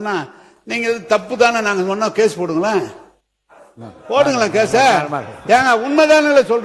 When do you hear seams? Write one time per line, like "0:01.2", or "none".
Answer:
none